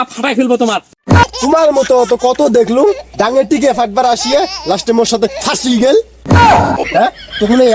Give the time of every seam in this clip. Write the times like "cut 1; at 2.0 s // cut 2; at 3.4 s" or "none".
cut 1; at 1.2 s // cut 2; at 6.8 s